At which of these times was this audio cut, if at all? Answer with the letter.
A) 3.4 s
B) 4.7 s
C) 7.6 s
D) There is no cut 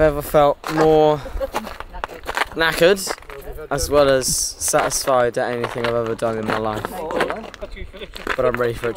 C